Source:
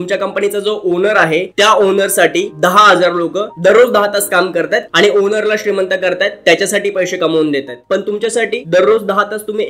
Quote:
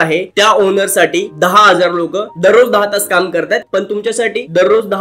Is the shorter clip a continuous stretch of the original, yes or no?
no